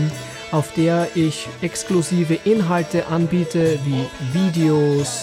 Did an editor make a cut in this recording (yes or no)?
no